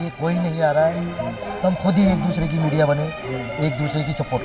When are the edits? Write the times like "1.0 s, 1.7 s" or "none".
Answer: none